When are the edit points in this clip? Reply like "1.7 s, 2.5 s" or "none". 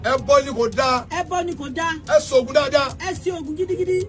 none